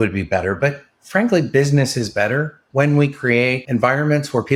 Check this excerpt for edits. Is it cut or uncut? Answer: uncut